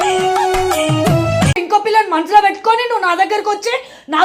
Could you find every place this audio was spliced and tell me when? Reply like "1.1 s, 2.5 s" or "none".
1.6 s